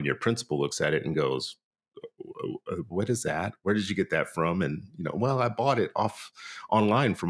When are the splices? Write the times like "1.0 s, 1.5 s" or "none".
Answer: none

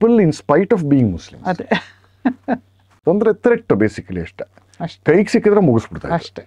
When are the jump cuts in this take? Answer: 3.0 s

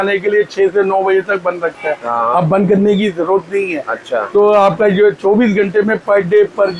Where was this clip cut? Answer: none

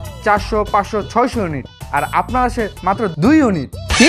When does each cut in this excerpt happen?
none

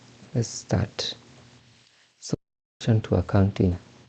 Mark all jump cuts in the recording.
2.3 s

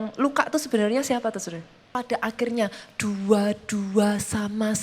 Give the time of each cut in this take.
1.9 s

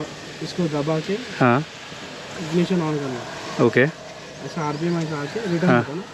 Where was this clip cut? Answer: none

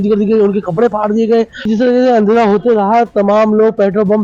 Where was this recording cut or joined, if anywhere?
1.7 s

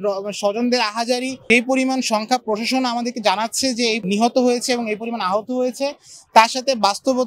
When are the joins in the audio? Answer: 1.4 s, 4.0 s

